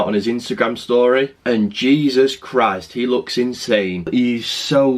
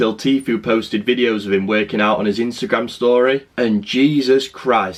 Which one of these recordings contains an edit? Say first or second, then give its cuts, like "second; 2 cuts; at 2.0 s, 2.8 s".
first; 1 cut; at 4.1 s